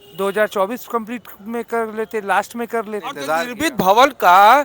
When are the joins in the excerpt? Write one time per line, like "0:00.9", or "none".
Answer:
0:03.2